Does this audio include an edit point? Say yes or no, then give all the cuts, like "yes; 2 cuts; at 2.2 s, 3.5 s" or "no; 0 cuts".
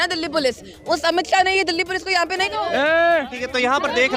yes; 1 cut; at 2.5 s